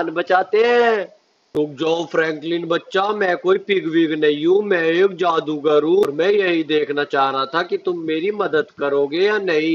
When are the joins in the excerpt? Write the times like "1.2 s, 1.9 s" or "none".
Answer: 1.4 s, 6.0 s